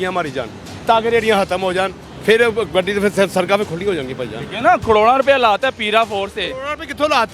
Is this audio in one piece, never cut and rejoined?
no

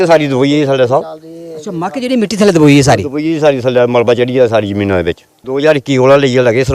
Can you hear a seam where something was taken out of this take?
yes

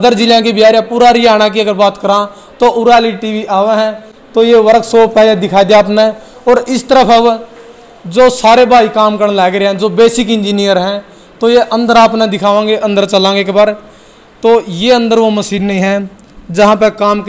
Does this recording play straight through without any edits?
yes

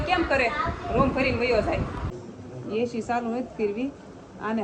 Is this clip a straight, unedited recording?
no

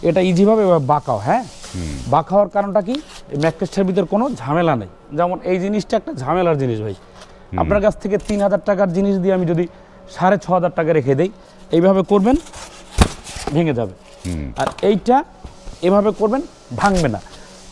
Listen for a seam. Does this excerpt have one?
no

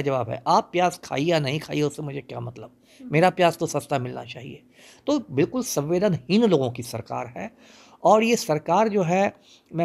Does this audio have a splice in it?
no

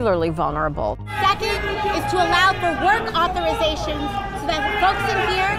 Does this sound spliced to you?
yes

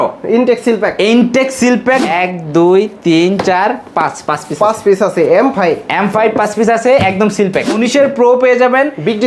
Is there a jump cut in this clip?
yes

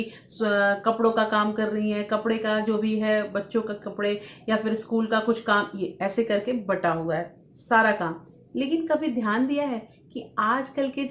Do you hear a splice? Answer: no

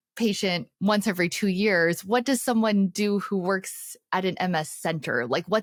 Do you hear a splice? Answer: no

